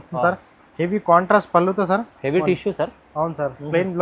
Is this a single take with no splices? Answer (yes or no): yes